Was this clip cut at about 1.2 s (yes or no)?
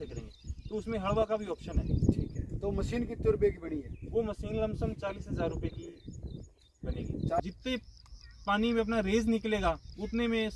no